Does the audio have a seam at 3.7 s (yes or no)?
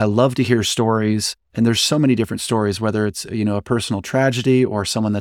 no